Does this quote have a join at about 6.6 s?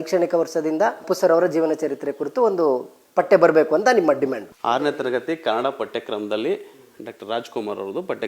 no; 2 cuts; at 1.1 s, 4.5 s

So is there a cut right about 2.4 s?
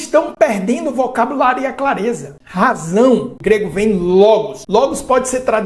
yes; 3 cuts; at 2.4 s, 3.3 s, 4.6 s

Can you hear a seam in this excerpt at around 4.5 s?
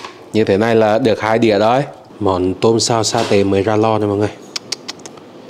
no; 1 cut; at 2.1 s

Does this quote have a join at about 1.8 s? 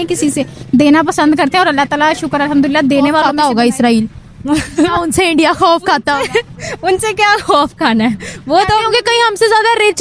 no; 1 cut; at 3.3 s

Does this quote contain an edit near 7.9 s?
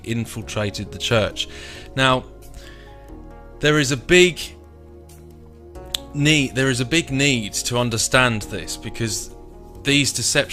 no; 0 cuts

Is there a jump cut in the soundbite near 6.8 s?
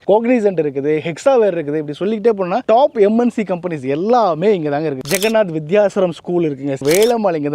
yes; 2 cuts; at 5.0 s, 6.8 s

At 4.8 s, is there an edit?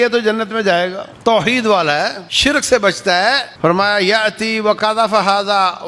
yes; 4 cuts; at 1.1 s, 2.2 s, 3.5 s, 4.8 s

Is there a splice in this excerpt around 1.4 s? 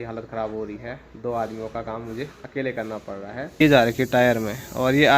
no; 1 cut; at 3.6 s

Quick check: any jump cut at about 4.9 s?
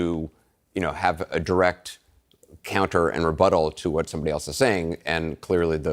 no; 0 cuts

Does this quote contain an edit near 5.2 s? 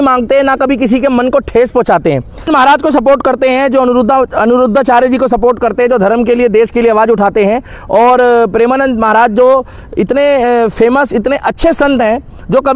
no; 1 cut; at 2.5 s

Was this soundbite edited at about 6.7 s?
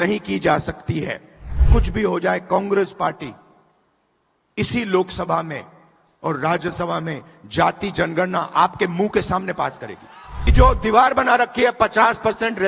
no; 2 cuts; at 1.6 s, 10.5 s

